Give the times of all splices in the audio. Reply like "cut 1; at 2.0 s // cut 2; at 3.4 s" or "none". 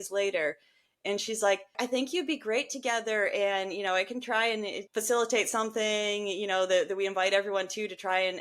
cut 1; at 1.8 s // cut 2; at 4.8 s